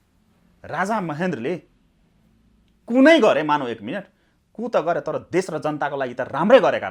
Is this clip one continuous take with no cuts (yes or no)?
yes